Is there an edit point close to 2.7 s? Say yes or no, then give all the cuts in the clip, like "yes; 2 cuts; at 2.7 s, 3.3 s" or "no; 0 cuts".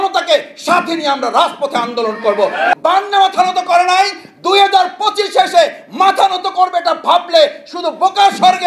yes; 1 cut; at 2.7 s